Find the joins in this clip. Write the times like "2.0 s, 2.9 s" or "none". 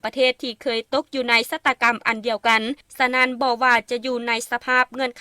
2.8 s

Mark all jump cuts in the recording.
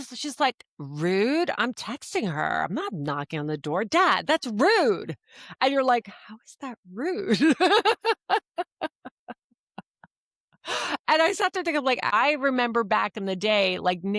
12.1 s

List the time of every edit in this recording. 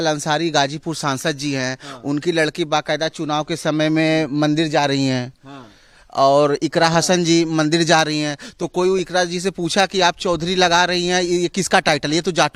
none

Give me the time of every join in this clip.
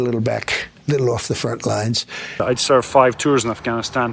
2.1 s

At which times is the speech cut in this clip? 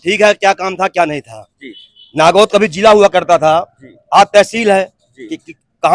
none

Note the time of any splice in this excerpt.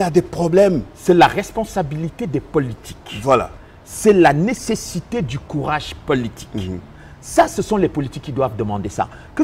none

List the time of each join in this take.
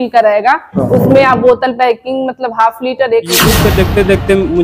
3.5 s

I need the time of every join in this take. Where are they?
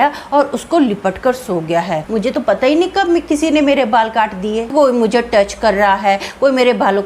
2.0 s, 4.7 s

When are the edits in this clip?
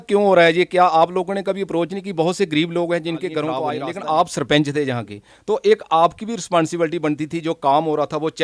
3.6 s

